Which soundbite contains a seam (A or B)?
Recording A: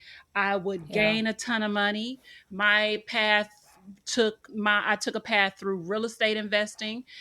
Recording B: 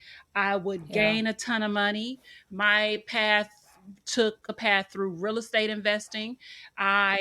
B